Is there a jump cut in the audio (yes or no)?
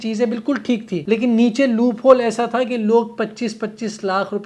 yes